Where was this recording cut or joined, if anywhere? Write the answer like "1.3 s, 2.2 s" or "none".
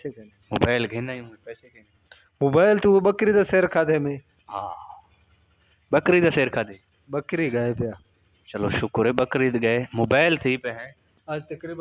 none